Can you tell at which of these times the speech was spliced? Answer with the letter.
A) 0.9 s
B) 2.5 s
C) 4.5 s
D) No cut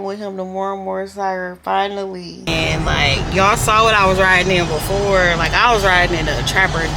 B